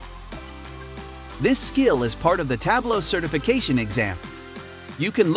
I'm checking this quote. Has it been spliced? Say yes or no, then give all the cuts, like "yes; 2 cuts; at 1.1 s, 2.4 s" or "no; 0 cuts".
yes; 1 cut; at 1.2 s